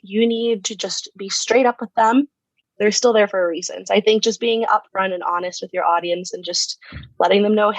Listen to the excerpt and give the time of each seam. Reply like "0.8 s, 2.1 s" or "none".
2.6 s